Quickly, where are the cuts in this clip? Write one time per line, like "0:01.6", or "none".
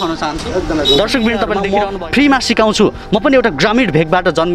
0:01.6